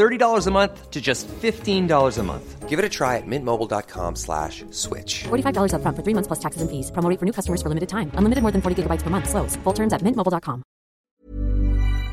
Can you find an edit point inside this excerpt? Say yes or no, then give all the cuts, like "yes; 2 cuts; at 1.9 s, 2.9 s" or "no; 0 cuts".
yes; 1 cut; at 11.0 s